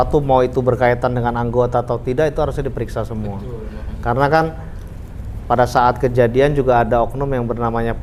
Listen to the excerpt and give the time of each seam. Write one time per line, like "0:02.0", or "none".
none